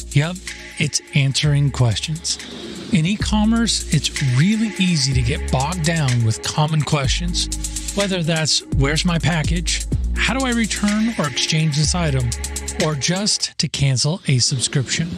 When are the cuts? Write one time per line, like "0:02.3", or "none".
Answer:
none

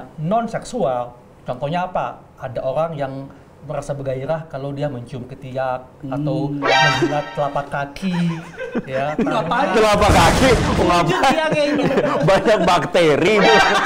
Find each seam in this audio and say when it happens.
none

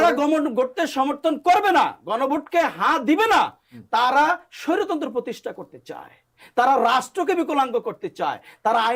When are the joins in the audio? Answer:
none

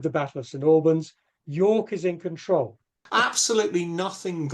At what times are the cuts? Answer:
0:03.0

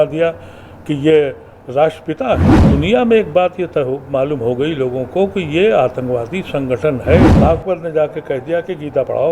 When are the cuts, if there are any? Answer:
0:02.6
0:07.3

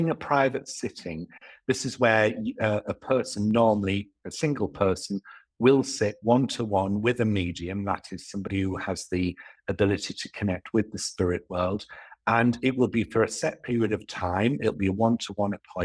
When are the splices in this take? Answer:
none

